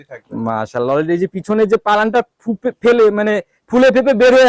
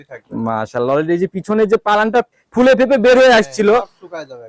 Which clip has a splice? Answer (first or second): second